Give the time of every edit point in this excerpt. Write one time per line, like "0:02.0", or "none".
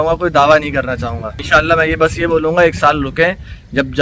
0:01.3